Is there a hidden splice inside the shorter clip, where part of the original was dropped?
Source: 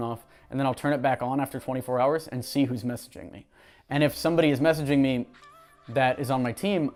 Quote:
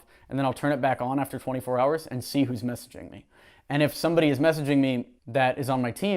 yes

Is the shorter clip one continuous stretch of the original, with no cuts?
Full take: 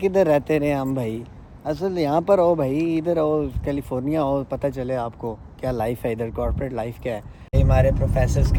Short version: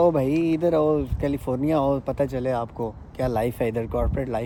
yes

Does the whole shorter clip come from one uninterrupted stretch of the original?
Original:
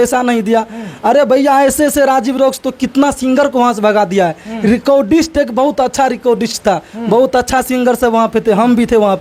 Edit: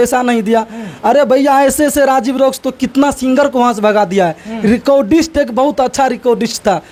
yes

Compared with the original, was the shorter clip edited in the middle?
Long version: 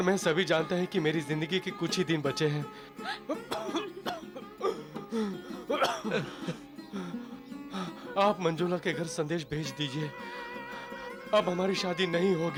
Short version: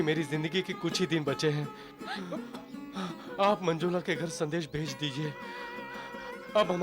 yes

